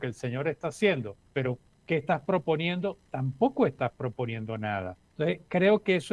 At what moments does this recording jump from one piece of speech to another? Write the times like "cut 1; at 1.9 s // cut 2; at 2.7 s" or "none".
cut 1; at 1.5 s // cut 2; at 5.0 s